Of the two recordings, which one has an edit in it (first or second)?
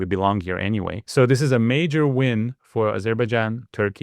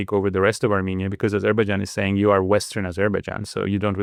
first